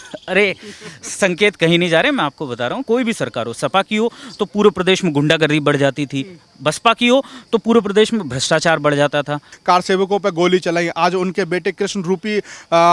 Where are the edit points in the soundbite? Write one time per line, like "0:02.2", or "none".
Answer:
0:02.8
0:09.5